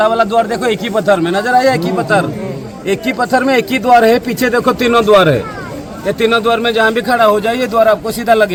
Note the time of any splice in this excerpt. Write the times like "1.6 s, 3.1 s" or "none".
none